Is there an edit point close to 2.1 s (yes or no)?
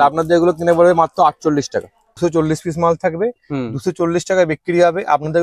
yes